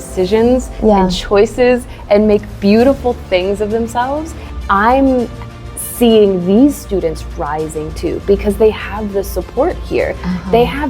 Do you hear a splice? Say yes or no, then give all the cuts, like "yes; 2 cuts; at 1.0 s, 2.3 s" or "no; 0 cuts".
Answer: yes; 1 cut; at 4.4 s